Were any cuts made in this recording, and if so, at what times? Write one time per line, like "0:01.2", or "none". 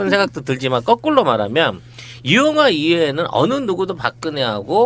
none